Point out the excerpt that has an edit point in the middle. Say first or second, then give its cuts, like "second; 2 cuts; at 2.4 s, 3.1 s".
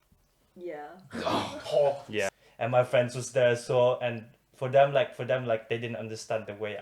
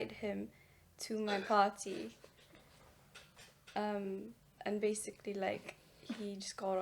first; 1 cut; at 2.4 s